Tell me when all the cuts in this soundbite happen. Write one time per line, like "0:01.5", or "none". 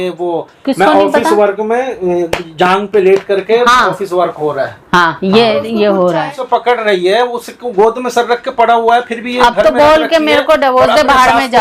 0:06.4